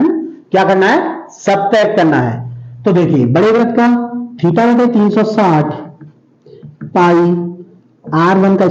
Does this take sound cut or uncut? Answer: uncut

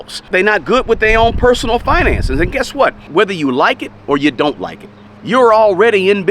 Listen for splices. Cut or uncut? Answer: cut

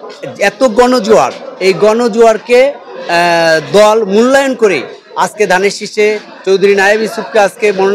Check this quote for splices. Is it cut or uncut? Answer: uncut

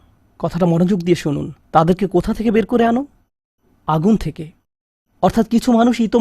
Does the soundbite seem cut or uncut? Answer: uncut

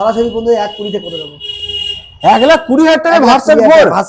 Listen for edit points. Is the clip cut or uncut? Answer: uncut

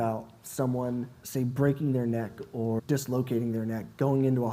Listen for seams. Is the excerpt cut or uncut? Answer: cut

